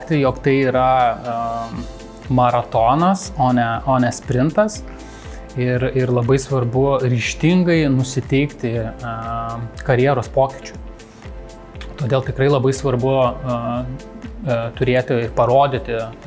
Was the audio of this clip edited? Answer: no; 0 cuts

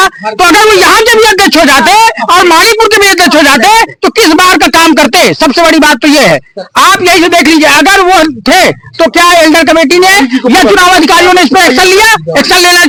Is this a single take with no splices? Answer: yes; 0 cuts

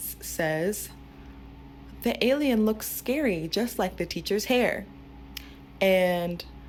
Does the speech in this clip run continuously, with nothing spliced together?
yes; 0 cuts

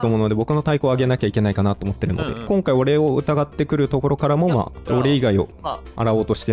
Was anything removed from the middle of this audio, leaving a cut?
yes; 2 cuts; at 2.5 s, 4.8 s

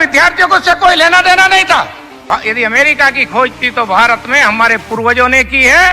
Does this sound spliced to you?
yes; 1 cut; at 2.2 s

